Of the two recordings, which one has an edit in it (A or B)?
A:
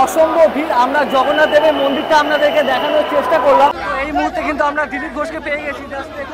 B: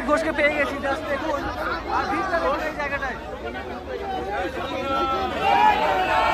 A